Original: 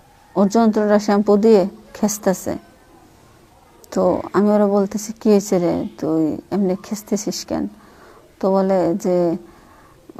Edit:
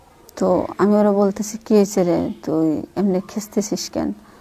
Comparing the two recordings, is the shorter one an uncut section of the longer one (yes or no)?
yes